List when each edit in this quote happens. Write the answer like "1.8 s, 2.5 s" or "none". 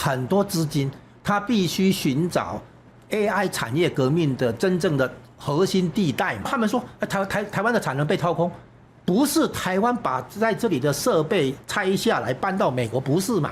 6.5 s